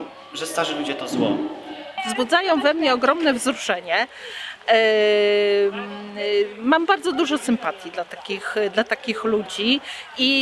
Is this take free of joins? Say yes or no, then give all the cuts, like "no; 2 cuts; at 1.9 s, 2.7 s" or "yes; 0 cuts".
no; 1 cut; at 1.4 s